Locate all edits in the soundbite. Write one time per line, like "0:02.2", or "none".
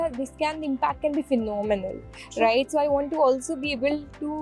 none